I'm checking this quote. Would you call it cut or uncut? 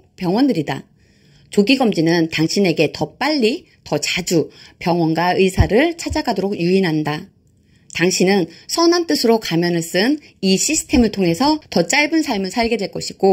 cut